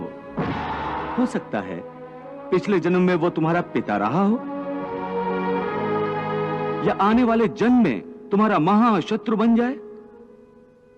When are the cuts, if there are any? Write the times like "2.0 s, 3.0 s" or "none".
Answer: 1.1 s

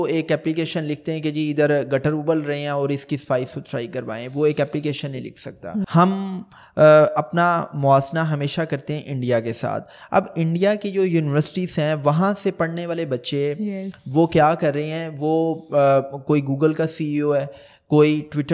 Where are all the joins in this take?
5.9 s

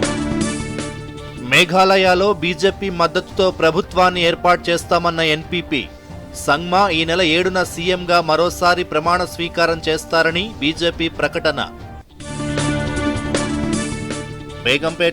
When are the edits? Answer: 1.0 s

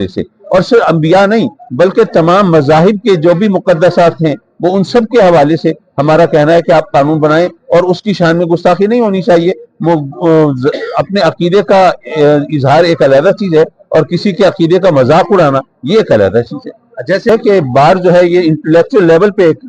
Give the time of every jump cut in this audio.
17.3 s

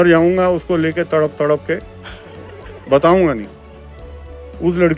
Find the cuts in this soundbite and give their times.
none

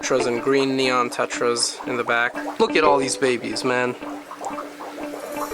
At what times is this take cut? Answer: 2.3 s

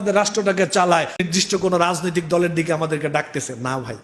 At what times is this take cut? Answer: 1.2 s

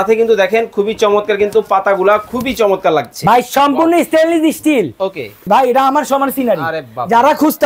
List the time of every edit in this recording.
5.5 s

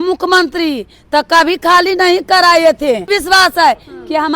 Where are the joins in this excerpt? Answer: 3.1 s

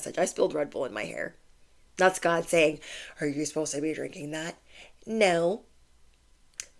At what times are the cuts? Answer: none

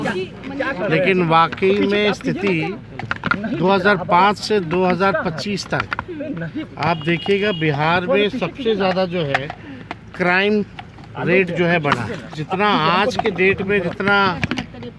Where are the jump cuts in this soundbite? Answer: 12.4 s

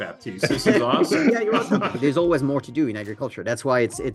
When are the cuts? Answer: 1.9 s

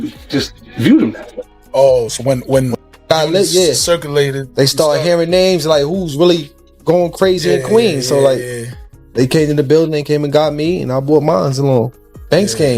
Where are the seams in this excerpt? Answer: 1.3 s

